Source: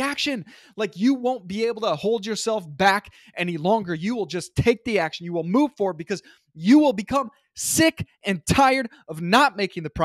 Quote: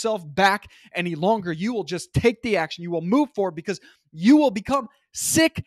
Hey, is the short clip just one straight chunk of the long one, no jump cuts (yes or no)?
yes